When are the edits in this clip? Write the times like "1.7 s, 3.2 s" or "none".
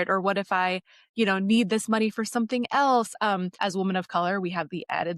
3.6 s